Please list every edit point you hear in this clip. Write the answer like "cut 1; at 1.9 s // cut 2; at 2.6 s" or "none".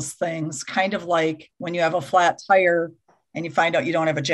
cut 1; at 1.5 s